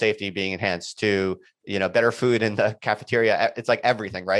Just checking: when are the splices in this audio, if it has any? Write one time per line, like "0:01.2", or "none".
none